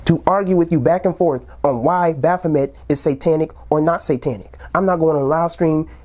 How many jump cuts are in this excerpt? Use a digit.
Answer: 1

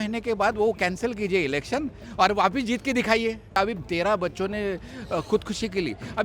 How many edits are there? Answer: 1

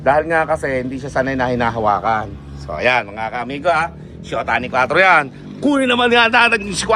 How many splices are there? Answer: 0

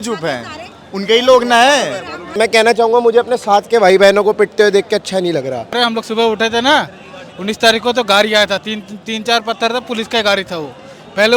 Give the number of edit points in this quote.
2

